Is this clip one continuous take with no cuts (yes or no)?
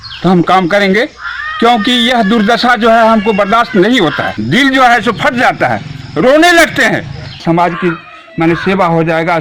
no